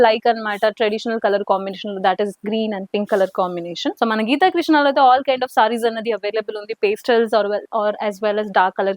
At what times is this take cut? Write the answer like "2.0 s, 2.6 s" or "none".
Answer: none